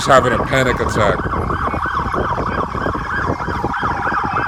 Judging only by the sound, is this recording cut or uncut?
uncut